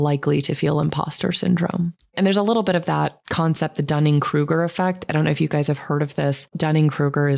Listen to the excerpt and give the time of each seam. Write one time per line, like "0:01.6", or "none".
0:02.1
0:03.2
0:06.5